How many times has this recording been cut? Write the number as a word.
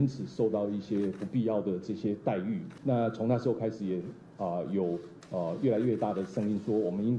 one